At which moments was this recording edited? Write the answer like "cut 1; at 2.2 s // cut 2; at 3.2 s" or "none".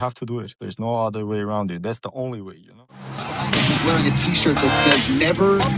cut 1; at 3.1 s